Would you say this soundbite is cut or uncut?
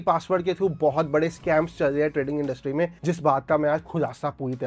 uncut